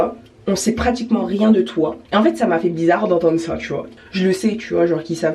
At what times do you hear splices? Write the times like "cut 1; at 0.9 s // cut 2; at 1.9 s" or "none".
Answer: cut 1; at 2.0 s // cut 2; at 3.9 s